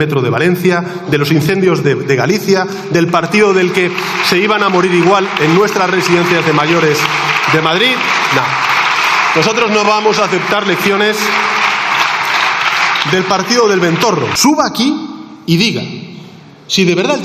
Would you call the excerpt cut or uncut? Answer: cut